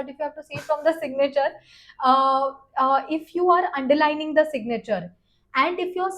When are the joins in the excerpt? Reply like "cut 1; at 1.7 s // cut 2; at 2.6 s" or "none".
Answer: none